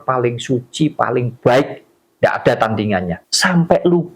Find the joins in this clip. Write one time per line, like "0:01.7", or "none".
0:03.2